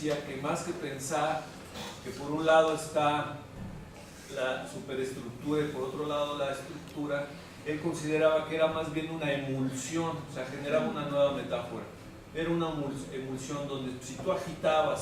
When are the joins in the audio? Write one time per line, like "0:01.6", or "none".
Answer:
none